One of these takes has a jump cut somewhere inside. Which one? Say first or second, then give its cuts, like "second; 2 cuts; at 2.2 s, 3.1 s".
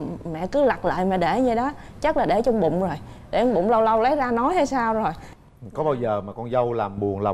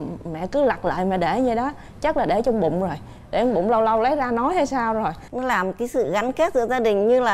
second; 1 cut; at 5.2 s